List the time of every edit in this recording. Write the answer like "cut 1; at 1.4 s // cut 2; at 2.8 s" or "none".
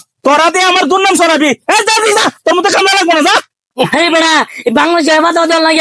cut 1; at 3.6 s